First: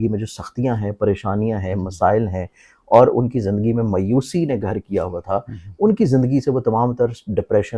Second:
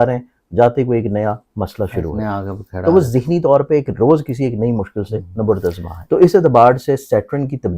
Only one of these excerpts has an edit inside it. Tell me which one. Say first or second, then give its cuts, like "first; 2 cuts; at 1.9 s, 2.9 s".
second; 1 cut; at 5.9 s